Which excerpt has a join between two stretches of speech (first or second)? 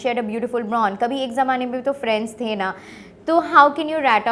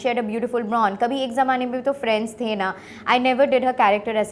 second